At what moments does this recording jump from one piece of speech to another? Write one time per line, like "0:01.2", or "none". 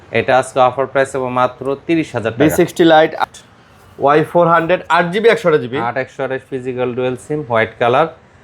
0:03.2